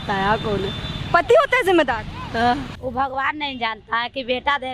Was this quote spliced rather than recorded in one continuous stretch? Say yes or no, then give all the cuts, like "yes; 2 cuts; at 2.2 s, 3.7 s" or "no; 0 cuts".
yes; 1 cut; at 2.8 s